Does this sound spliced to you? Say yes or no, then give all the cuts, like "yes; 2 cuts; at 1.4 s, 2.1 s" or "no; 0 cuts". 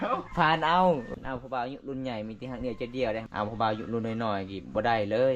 yes; 2 cuts; at 1.1 s, 3.2 s